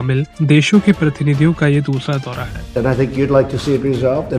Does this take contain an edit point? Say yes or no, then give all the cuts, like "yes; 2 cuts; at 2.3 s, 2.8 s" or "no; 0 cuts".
yes; 1 cut; at 2.7 s